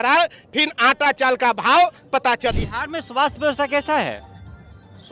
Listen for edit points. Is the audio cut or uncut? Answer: cut